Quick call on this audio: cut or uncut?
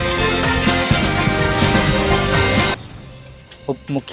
cut